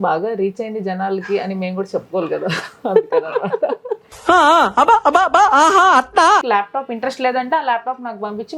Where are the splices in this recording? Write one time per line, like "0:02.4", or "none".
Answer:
0:06.4